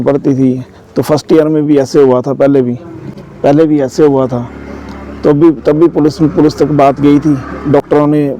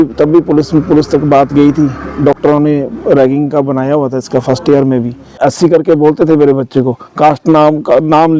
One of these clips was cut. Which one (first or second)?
second